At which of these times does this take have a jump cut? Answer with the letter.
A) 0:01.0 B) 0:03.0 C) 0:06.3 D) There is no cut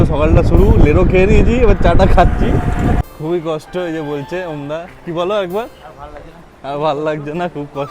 B